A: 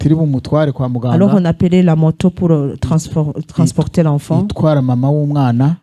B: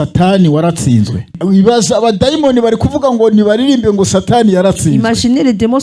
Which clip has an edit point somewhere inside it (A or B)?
B